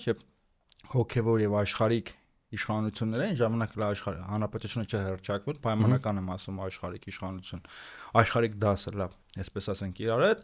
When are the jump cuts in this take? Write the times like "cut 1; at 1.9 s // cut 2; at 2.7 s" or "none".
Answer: none

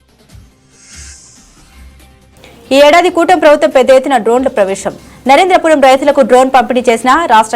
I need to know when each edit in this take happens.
cut 1; at 2.3 s

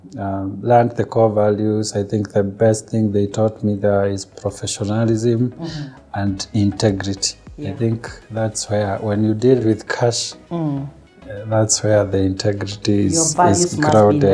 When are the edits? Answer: none

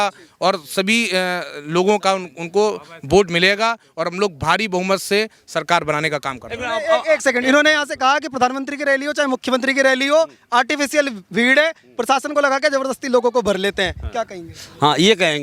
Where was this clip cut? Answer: none

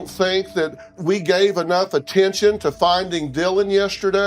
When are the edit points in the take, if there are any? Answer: cut 1; at 1.0 s

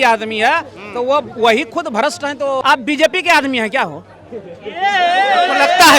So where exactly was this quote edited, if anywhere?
cut 1; at 2.6 s

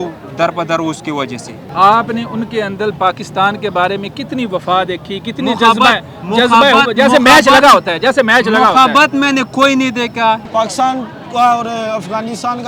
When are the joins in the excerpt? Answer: cut 1; at 1.6 s // cut 2; at 10.4 s

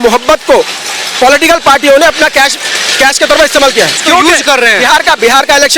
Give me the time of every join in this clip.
cut 1; at 4.0 s

